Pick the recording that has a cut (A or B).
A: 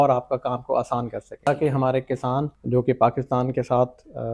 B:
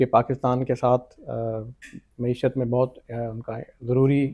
A